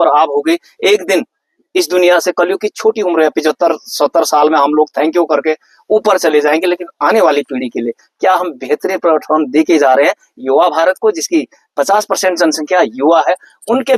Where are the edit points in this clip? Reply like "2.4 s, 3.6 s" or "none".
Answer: none